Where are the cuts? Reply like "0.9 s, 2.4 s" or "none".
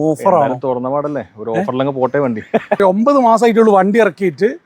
2.8 s